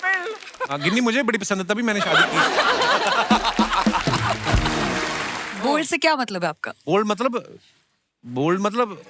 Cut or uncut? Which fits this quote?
cut